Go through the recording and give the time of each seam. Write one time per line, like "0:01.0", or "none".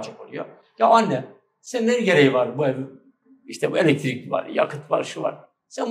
none